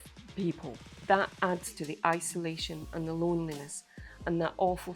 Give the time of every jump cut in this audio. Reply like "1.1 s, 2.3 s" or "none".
0.9 s